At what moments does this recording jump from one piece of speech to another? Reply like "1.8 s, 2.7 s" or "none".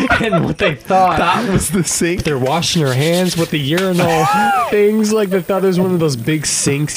2.2 s